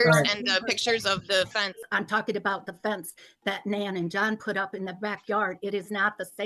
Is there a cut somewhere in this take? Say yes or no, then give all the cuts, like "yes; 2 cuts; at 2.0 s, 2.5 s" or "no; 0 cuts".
yes; 1 cut; at 1.8 s